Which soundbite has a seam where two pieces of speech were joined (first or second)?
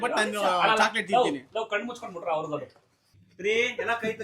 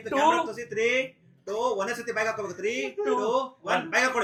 first